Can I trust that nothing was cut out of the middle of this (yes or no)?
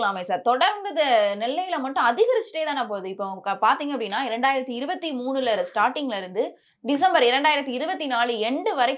yes